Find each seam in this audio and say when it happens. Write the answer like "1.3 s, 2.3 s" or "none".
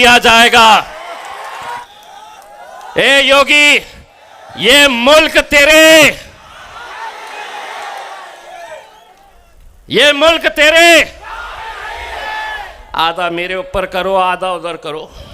1.8 s